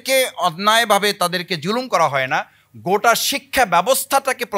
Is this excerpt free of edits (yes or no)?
yes